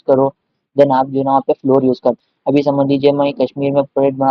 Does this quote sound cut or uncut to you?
cut